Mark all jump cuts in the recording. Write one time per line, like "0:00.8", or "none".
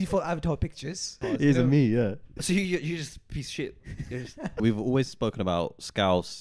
0:01.1
0:02.3
0:04.6